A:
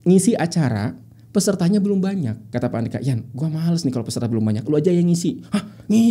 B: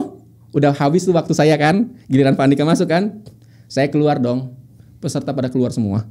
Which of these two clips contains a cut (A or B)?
A